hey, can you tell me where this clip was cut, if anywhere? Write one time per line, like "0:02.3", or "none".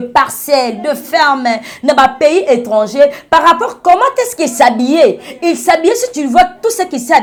none